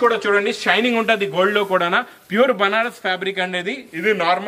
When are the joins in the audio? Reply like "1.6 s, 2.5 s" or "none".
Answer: none

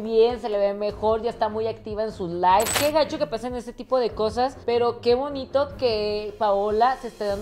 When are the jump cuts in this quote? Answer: 2.7 s

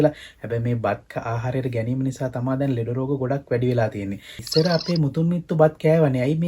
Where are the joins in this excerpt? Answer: 4.4 s

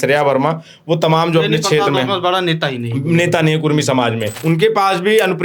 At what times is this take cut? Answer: 4.3 s

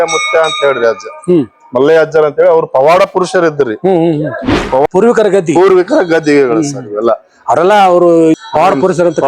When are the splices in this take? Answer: 4.8 s, 8.4 s

